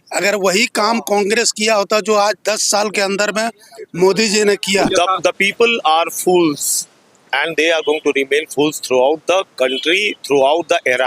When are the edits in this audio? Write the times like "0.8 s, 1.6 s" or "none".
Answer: 4.9 s